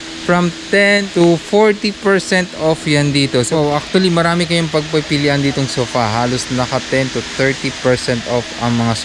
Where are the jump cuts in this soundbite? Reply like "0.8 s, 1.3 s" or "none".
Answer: 1.1 s, 3.5 s